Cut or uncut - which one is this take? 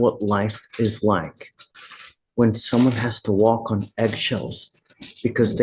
uncut